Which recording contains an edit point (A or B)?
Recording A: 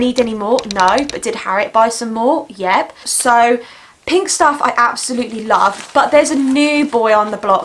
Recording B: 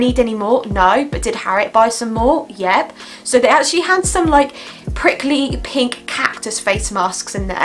A